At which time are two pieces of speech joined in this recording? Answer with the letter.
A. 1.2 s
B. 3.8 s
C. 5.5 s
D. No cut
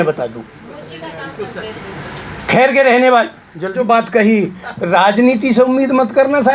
B